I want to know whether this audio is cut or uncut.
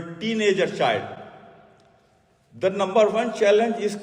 uncut